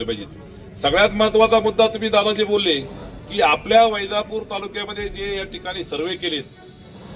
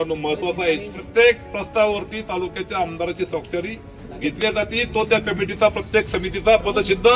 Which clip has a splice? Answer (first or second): second